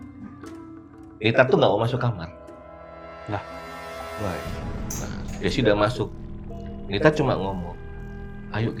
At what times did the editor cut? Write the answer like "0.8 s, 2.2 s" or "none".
none